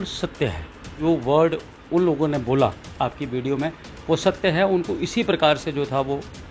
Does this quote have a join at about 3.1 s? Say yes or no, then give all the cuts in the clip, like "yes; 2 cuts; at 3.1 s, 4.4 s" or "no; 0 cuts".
no; 1 cut; at 0.9 s